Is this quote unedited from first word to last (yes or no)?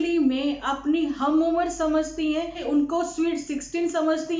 no